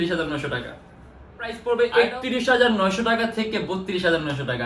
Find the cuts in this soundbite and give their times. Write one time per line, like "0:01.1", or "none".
0:01.6